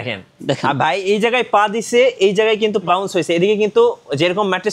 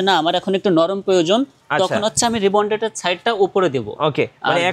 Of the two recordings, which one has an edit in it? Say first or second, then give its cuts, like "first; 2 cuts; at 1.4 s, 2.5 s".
first; 1 cut; at 2.8 s